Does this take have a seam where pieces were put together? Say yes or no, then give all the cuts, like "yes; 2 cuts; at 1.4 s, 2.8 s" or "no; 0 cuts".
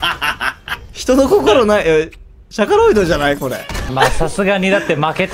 yes; 1 cut; at 3.9 s